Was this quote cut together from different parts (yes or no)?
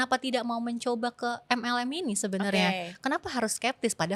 no